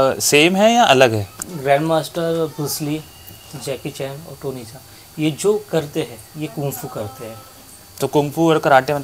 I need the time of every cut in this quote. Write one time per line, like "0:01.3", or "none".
0:01.4